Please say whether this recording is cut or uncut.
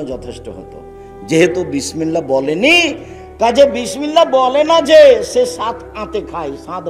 uncut